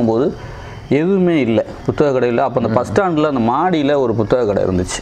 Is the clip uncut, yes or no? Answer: yes